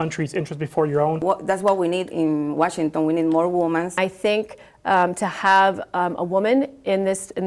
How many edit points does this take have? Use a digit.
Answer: 2